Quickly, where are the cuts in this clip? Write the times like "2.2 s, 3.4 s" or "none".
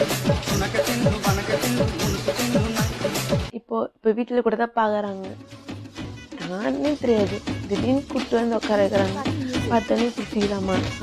3.5 s